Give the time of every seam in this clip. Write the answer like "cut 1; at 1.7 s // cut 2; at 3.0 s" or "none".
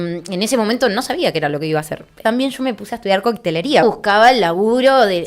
cut 1; at 2.1 s // cut 2; at 3.8 s